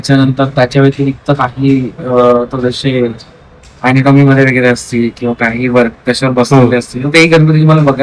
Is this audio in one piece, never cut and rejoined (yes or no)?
yes